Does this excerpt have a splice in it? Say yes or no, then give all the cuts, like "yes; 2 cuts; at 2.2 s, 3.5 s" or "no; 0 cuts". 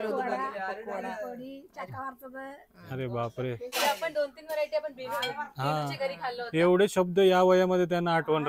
no; 0 cuts